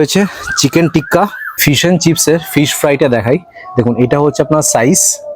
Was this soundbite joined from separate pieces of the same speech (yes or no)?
yes